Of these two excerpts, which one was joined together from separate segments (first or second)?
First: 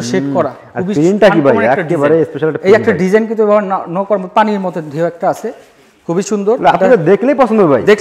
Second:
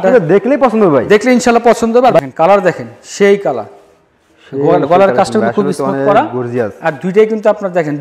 second